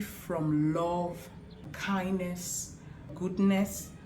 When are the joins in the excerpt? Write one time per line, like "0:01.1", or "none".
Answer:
0:01.8
0:03.1